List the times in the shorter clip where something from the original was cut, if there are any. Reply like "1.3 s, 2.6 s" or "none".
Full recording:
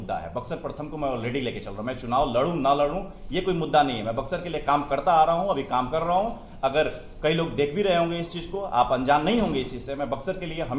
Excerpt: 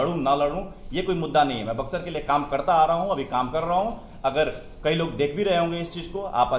none